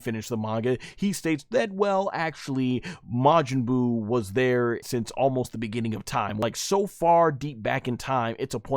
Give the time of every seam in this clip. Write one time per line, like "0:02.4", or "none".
0:04.8
0:06.4